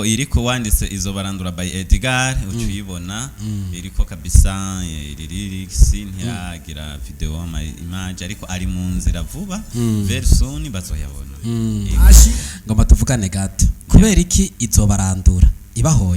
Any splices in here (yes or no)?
no